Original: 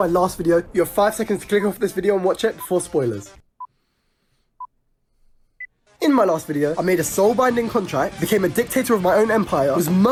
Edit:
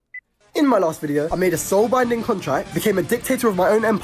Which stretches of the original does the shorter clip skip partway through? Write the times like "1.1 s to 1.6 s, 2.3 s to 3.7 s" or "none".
none